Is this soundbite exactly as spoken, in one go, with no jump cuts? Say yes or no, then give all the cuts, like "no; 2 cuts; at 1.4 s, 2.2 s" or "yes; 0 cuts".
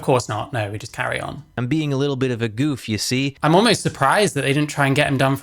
no; 2 cuts; at 1.6 s, 3.3 s